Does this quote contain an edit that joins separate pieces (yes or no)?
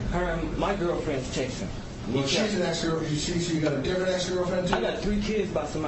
no